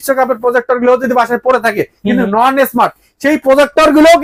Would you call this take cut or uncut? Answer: uncut